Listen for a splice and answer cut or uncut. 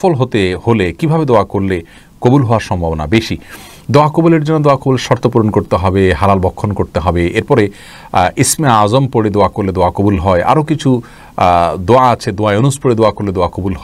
uncut